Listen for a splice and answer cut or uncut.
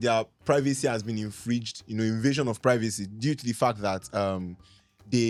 uncut